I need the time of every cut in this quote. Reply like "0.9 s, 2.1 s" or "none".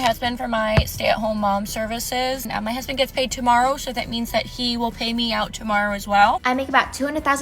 2.4 s, 6.4 s